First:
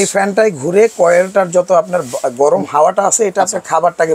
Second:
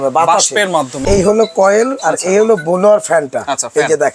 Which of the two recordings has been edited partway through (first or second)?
second